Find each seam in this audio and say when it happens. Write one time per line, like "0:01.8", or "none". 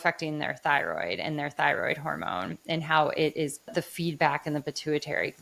0:03.8